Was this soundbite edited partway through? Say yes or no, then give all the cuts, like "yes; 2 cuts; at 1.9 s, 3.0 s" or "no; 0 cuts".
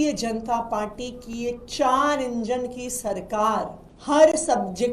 yes; 1 cut; at 3.9 s